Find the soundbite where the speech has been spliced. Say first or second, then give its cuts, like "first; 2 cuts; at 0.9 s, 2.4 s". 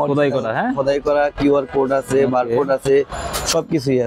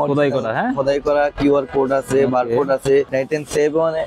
second; 1 cut; at 3.1 s